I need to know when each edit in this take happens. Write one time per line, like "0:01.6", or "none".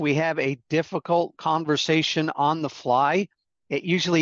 0:01.4

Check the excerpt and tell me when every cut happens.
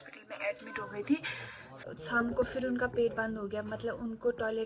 0:01.7

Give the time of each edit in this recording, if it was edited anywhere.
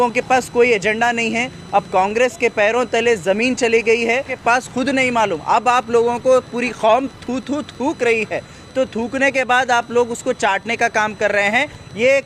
0:04.3

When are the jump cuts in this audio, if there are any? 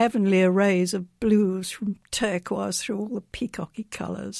none

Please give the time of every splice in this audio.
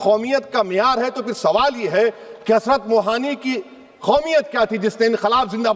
none

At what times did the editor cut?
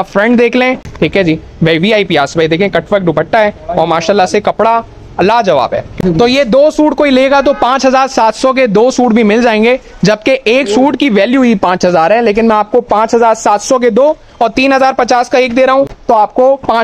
0:00.8
0:06.0
0:16.0

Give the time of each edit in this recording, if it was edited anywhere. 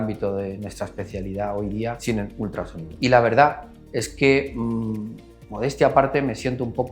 0:02.8

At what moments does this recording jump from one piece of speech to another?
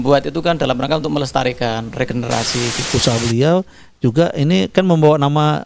0:02.8

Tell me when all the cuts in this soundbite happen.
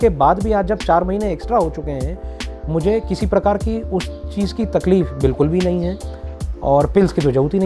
0:06.2

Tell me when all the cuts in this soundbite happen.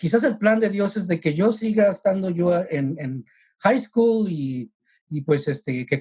none

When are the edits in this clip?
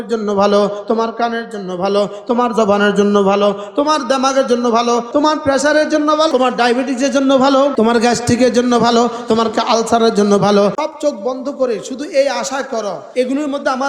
0:05.1
0:06.3
0:07.7
0:10.8
0:13.0

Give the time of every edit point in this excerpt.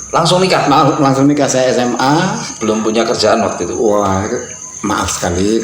0:02.5

